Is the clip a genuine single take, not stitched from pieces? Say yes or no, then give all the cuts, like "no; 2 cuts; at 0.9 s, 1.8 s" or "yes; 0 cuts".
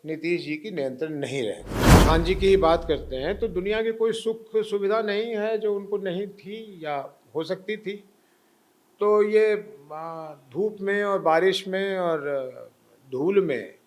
no; 1 cut; at 1.7 s